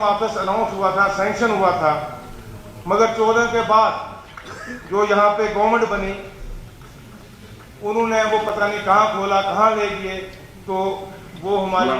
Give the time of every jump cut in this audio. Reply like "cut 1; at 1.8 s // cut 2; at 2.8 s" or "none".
none